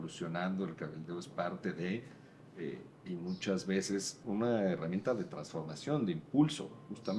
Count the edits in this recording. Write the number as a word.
one